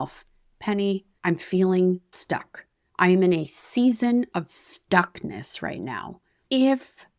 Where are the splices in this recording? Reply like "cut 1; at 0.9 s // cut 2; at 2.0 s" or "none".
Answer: cut 1; at 1.1 s